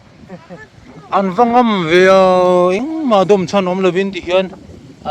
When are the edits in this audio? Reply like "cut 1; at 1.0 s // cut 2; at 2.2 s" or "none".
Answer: none